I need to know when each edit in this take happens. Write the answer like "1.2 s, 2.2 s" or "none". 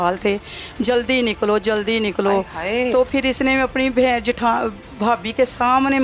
none